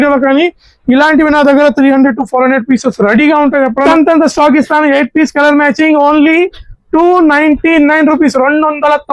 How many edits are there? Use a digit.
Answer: 1